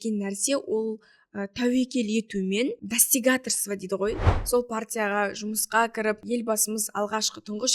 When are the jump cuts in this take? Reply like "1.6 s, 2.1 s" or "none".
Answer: 2.8 s, 4.3 s, 6.2 s